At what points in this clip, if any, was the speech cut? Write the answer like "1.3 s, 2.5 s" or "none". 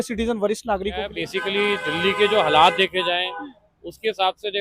1.1 s